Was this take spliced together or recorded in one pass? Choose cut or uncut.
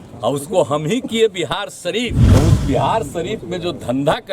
cut